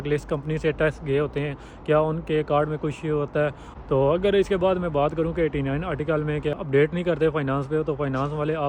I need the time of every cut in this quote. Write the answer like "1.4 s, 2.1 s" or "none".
3.7 s, 6.5 s